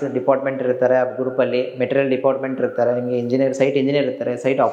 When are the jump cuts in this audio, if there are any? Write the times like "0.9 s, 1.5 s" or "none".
none